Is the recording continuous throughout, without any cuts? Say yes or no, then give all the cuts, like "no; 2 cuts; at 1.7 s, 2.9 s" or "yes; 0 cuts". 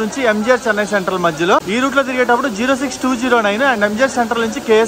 yes; 0 cuts